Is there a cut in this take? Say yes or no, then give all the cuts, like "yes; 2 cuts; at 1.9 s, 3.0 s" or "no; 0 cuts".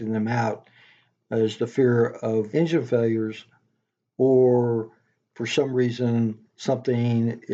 no; 0 cuts